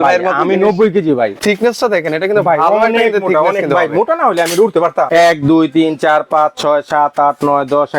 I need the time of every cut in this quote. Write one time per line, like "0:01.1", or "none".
0:01.4
0:05.1